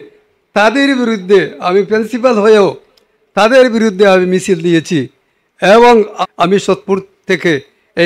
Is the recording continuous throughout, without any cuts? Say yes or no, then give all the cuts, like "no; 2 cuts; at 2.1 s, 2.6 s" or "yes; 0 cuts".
no; 1 cut; at 6.1 s